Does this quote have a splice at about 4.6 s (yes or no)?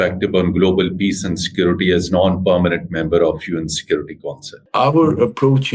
yes